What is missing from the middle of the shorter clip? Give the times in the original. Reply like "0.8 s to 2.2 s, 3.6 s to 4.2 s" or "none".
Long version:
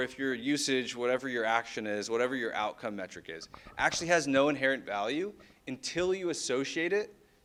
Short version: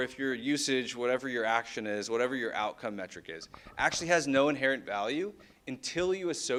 none